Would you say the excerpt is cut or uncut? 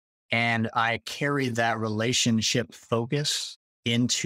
uncut